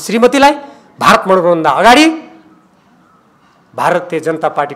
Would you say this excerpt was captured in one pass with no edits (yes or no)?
yes